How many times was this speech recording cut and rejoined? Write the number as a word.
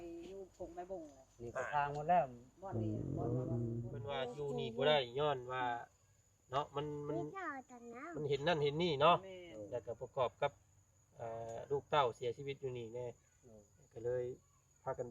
one